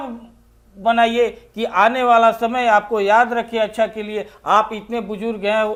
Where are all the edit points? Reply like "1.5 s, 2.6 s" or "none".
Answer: none